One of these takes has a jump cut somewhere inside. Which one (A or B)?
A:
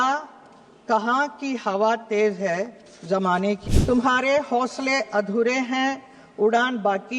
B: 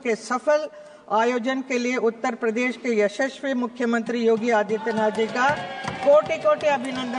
A